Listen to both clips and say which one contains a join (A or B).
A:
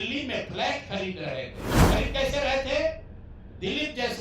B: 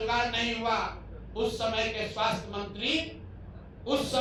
A